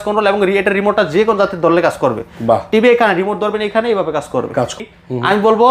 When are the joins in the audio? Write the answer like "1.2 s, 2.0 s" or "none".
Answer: 4.7 s